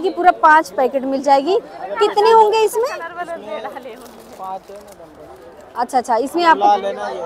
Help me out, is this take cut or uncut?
uncut